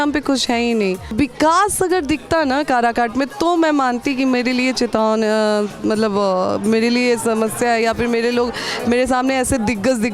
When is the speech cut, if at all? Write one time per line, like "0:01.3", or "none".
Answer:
0:01.1